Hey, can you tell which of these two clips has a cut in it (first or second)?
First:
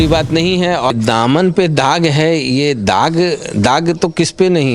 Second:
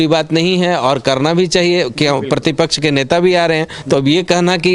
first